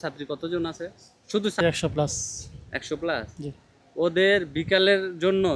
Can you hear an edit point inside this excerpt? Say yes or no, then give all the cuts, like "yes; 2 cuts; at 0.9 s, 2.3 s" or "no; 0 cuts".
yes; 1 cut; at 1.6 s